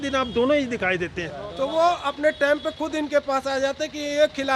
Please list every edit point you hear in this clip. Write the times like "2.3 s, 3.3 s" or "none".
1.5 s